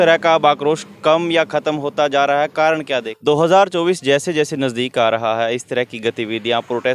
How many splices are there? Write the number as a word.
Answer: one